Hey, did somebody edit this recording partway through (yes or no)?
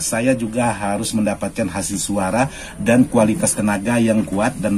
no